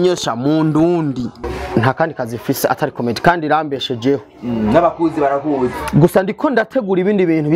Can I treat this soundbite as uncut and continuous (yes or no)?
no